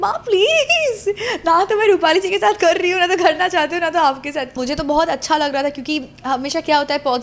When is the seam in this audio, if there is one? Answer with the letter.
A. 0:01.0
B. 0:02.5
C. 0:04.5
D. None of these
C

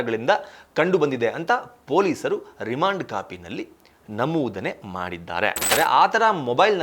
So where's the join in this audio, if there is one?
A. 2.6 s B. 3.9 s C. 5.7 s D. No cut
C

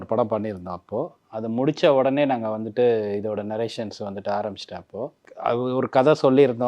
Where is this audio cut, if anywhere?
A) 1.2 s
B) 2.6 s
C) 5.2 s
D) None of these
C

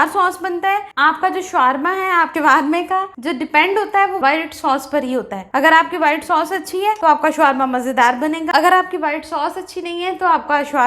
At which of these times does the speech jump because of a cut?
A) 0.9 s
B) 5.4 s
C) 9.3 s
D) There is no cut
A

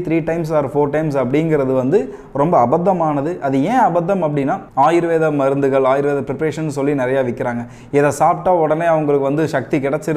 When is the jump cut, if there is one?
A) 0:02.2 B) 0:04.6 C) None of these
B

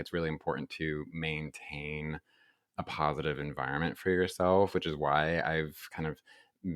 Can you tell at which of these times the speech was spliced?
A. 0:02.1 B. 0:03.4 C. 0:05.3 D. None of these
D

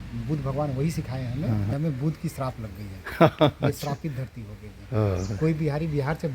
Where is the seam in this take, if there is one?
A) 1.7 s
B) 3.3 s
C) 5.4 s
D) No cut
A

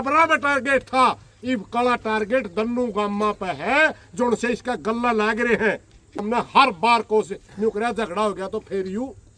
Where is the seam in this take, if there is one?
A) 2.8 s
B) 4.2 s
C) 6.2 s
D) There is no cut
C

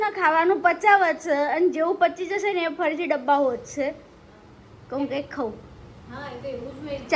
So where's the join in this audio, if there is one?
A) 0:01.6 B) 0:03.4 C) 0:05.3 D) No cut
D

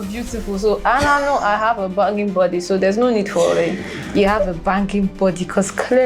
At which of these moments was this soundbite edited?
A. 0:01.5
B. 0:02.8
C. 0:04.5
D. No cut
D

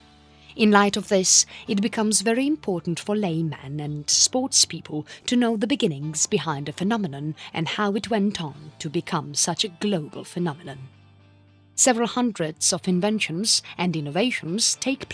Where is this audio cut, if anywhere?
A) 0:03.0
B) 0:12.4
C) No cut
A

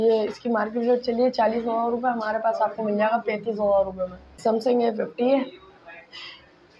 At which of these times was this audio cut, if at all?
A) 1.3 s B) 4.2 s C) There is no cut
B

